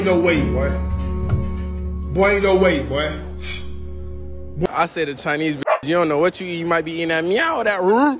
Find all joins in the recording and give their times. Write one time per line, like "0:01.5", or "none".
0:04.7